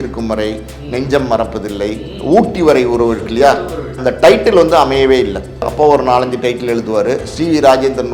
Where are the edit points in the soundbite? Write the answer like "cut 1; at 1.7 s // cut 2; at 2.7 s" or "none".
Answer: cut 1; at 4.0 s // cut 2; at 5.6 s